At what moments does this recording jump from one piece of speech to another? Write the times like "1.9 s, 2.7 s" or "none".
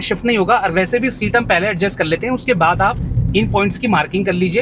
none

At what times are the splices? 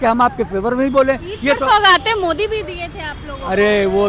none

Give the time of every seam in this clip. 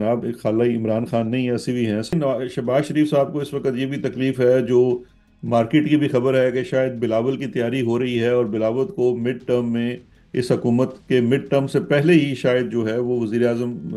2.1 s

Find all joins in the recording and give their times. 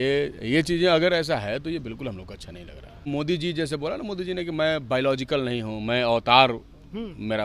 3.1 s

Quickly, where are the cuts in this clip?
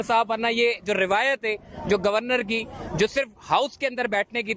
none

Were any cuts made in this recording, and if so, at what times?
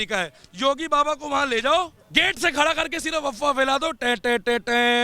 2.0 s

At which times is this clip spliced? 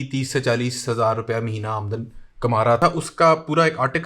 none

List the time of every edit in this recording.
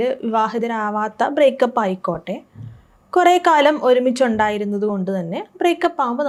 none

